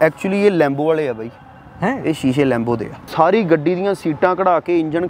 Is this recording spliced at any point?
yes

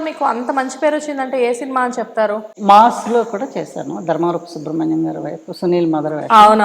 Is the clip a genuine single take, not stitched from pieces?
no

